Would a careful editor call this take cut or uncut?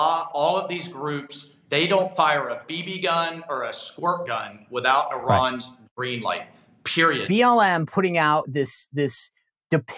cut